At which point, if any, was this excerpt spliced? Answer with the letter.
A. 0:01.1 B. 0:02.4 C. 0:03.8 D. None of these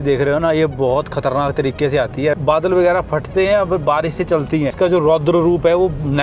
B